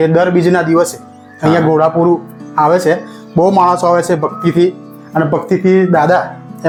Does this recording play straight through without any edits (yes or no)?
yes